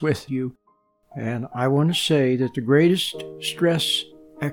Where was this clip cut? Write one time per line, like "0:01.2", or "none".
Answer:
0:01.0